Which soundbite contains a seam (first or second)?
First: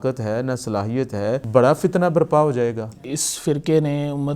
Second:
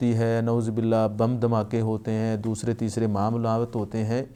first